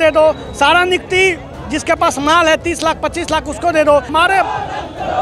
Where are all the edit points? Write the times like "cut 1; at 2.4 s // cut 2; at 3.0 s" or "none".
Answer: cut 1; at 4.1 s